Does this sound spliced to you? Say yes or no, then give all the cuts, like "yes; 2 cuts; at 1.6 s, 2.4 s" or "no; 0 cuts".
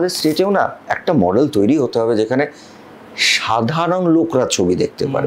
no; 0 cuts